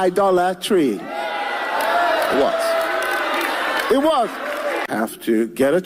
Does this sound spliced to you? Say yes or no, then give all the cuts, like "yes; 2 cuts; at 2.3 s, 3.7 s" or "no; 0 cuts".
yes; 1 cut; at 4.9 s